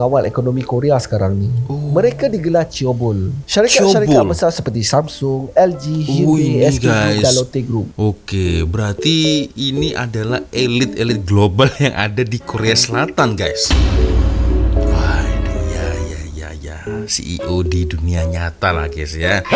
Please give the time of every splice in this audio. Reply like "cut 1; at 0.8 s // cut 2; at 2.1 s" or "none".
none